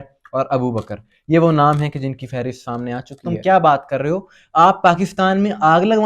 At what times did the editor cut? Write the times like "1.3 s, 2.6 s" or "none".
3.2 s